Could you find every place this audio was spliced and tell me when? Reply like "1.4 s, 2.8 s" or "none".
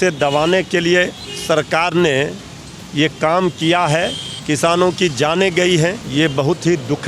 1.3 s, 4.3 s, 6.0 s

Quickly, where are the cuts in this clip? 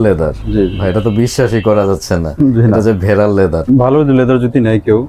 3.6 s

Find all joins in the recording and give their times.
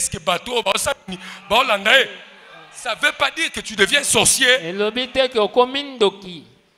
none

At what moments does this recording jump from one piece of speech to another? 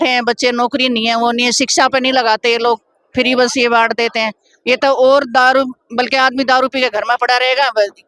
none

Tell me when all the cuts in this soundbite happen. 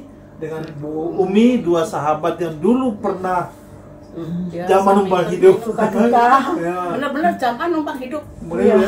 none

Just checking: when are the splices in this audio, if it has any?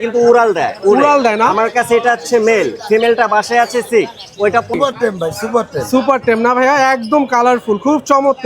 4.7 s

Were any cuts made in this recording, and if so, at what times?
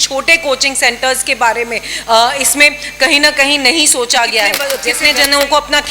4.7 s

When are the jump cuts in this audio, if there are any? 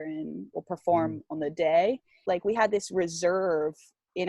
2.1 s

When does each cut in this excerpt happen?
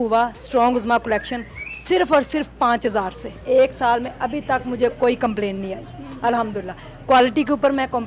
3.4 s

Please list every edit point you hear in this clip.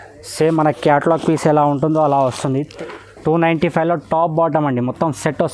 2.7 s

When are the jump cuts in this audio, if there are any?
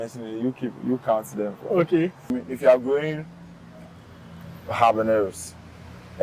2.4 s

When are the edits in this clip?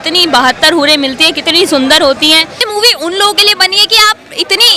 2.6 s

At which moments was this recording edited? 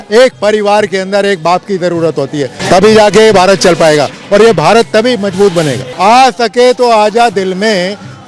2.6 s, 5.8 s

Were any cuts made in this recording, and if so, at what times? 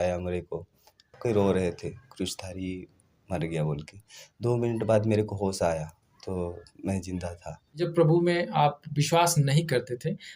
1.1 s, 7.9 s

